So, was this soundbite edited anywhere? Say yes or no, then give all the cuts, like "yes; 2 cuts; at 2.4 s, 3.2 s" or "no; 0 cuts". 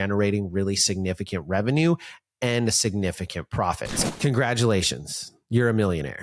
yes; 1 cut; at 3.9 s